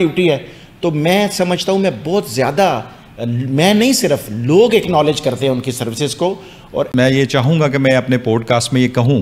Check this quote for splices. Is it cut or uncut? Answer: cut